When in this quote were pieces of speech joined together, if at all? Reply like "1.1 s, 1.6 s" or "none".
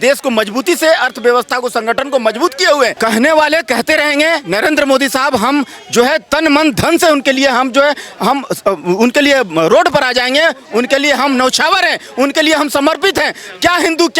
3.0 s